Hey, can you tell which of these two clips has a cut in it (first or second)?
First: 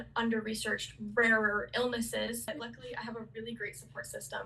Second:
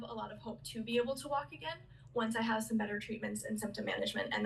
first